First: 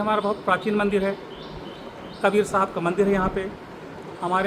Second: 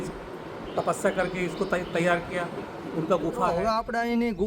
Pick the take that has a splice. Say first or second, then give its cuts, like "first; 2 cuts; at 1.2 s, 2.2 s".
second; 1 cut; at 3.5 s